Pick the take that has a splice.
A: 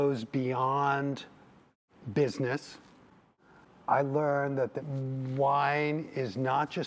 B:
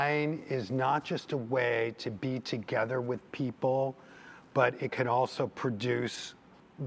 A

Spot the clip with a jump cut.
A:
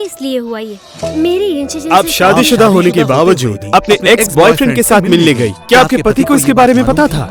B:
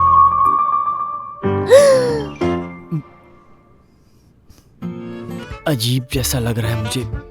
B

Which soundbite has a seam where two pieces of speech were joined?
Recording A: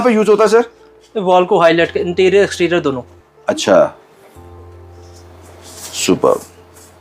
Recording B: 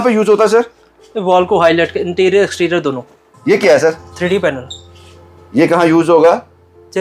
B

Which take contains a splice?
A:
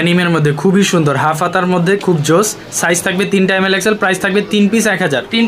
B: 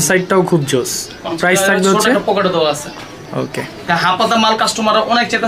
B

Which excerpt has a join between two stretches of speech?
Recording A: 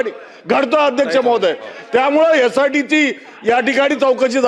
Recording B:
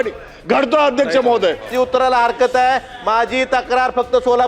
B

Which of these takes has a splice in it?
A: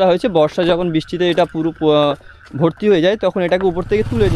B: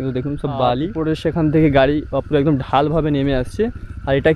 B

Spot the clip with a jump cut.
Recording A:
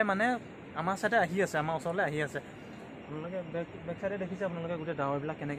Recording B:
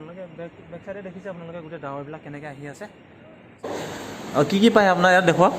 B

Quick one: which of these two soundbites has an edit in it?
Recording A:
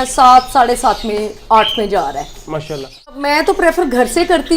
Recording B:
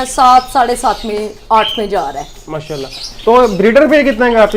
A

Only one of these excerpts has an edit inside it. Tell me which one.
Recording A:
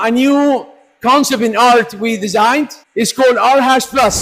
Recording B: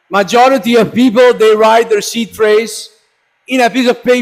A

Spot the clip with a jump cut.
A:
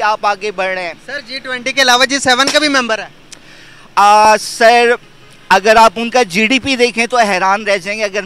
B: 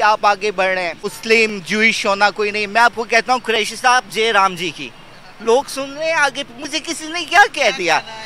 B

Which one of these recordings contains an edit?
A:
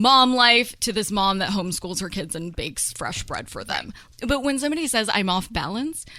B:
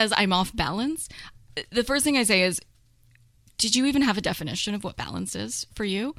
A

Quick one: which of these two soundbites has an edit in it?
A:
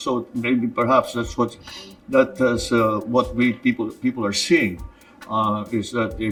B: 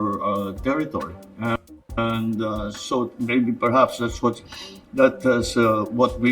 B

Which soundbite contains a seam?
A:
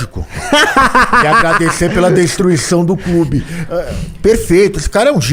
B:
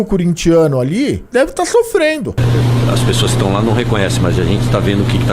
B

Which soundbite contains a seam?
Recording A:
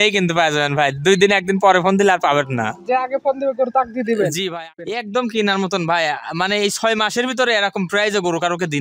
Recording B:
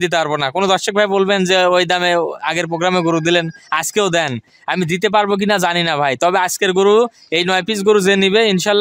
A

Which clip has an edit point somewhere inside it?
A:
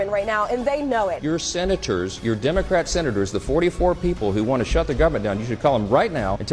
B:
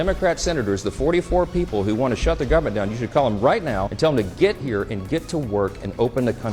A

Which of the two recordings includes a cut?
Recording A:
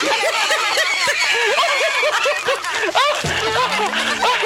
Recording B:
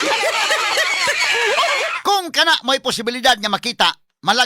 B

